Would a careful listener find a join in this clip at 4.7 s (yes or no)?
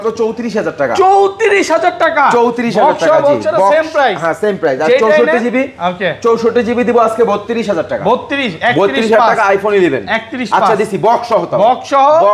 no